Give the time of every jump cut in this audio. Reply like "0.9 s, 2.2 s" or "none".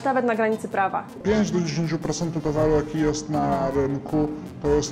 1.2 s